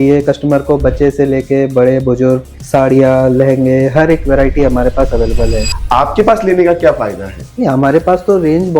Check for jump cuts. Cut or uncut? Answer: cut